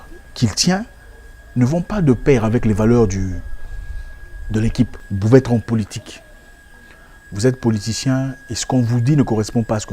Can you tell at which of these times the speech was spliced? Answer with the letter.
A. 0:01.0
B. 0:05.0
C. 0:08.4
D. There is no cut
B